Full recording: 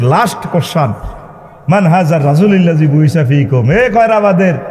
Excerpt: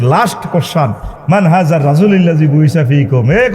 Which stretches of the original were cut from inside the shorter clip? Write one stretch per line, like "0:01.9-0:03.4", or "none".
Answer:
0:01.1-0:01.5